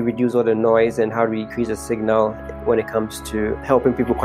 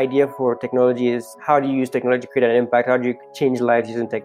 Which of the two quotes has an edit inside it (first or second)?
second